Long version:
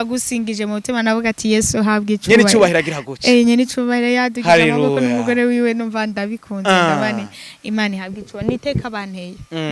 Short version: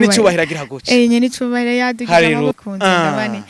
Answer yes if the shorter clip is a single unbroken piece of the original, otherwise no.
no